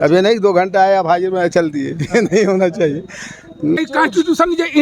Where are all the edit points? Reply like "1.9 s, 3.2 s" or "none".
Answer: 3.8 s